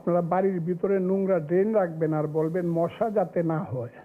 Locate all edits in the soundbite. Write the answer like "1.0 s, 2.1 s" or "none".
none

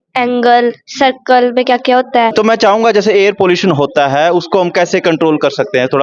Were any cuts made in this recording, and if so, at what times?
2.3 s

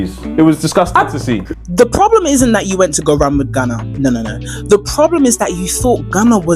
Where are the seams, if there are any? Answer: 1.5 s

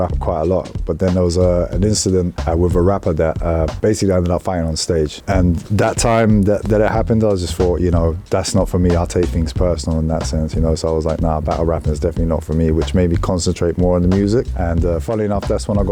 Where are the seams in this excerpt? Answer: none

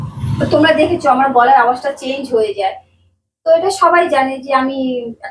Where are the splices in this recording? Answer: none

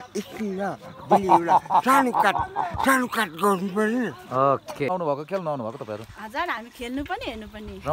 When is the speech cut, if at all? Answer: 4.9 s

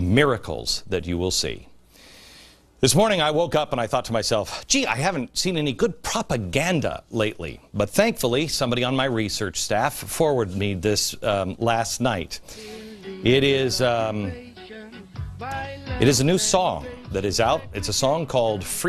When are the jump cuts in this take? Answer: 16.5 s

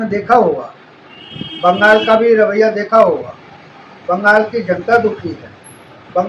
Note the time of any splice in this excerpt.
none

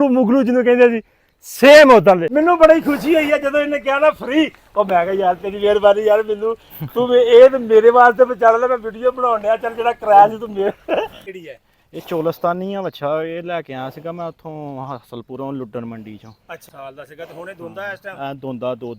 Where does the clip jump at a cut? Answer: 2.2 s, 11.3 s, 16.6 s

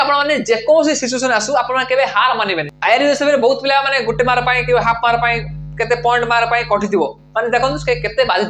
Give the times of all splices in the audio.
2.7 s

